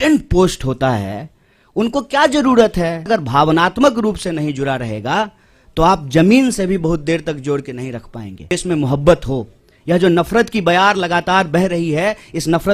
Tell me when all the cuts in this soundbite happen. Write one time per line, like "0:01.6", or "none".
0:03.0
0:08.5